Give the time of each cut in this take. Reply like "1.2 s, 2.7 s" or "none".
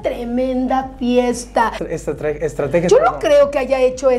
1.8 s

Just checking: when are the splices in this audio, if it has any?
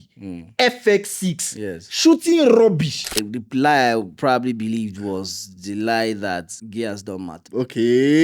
3.2 s, 6.5 s, 7.5 s

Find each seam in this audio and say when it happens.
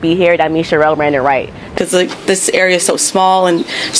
1.5 s

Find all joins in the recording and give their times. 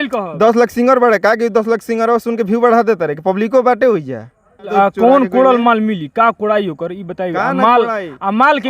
4.7 s

